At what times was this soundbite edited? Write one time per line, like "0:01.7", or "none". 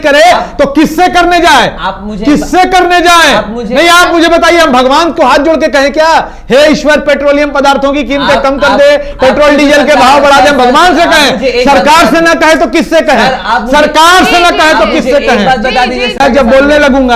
0:16.2